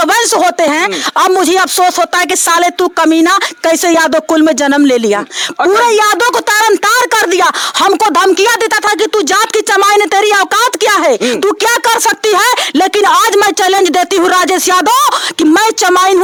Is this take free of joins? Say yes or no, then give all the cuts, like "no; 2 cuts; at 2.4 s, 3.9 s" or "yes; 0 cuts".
yes; 0 cuts